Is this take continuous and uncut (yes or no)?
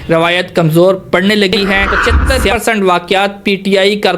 no